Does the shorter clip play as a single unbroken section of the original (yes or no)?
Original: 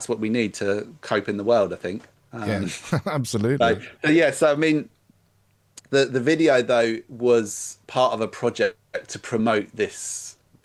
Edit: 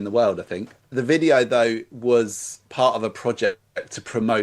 no